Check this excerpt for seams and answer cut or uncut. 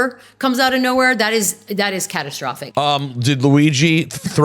cut